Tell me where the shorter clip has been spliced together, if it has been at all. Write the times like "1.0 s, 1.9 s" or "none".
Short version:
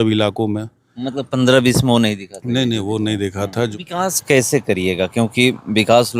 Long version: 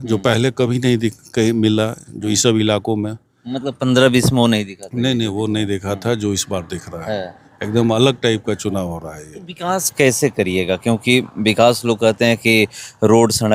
3.7 s